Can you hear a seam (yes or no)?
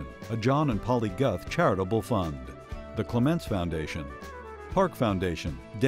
no